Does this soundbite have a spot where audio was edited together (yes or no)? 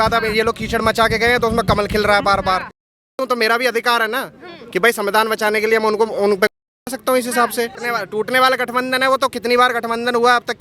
yes